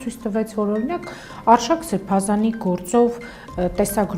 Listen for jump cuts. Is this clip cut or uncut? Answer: uncut